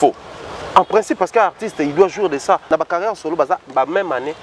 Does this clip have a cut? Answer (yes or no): yes